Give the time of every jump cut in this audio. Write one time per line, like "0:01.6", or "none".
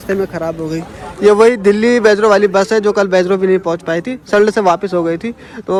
none